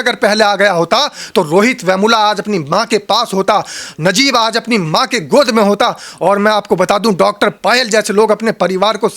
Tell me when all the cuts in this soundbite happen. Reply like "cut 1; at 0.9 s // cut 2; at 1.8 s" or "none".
none